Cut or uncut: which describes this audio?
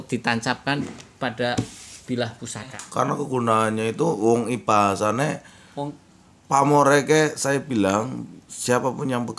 cut